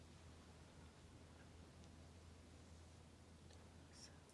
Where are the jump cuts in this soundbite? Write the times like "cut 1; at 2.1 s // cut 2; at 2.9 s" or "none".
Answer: cut 1; at 3.0 s